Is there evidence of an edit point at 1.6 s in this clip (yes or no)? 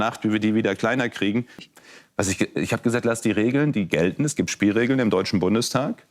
yes